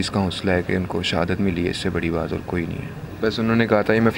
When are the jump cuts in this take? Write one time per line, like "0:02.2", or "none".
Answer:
0:03.1